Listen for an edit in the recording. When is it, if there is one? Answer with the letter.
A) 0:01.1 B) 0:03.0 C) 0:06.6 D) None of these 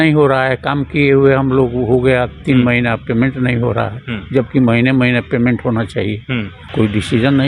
C